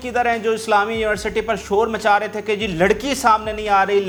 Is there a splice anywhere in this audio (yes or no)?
no